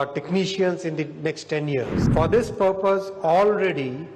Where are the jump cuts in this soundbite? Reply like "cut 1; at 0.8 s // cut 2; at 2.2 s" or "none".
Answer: cut 1; at 2.0 s